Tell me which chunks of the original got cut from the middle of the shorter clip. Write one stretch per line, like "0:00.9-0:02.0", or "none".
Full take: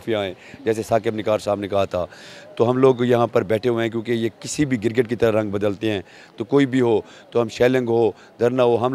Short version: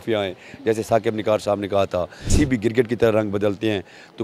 0:02.2-0:04.4